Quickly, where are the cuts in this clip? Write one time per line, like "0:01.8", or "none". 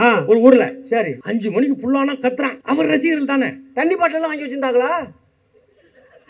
0:01.2
0:02.6